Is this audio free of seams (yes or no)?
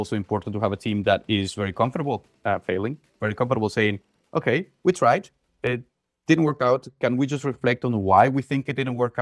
yes